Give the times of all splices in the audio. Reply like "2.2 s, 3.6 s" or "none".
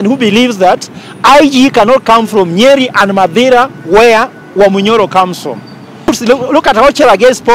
6.1 s